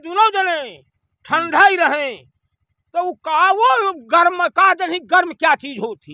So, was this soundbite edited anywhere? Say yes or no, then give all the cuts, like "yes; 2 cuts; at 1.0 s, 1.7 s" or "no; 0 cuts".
no; 0 cuts